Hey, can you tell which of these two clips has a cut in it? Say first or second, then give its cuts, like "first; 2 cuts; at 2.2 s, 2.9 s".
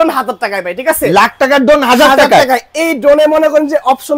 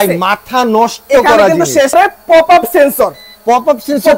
second; 1 cut; at 1.9 s